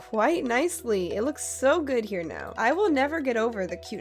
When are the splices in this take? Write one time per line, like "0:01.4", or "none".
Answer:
0:02.4